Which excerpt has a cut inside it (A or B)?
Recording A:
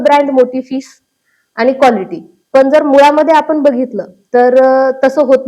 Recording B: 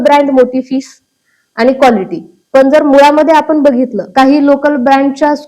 B